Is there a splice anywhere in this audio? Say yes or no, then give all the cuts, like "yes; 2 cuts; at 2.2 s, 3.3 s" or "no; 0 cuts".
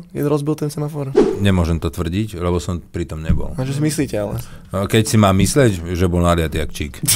no; 0 cuts